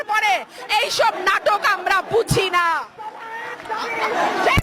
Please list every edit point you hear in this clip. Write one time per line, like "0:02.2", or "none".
none